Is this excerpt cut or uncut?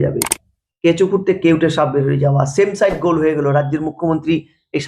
uncut